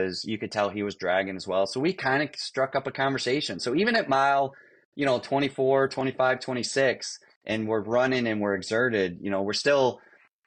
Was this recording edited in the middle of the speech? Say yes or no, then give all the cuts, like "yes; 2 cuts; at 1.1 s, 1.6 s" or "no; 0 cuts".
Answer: no; 0 cuts